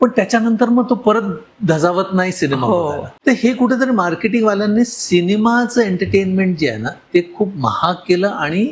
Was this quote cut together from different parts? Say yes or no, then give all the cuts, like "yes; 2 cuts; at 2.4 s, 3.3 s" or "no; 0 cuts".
no; 0 cuts